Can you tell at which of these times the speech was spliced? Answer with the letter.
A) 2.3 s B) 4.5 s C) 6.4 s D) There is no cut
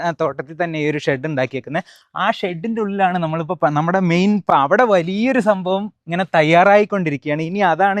B